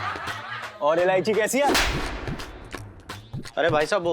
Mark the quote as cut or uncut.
uncut